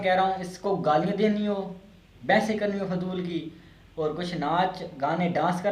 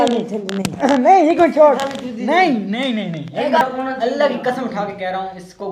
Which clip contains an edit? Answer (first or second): second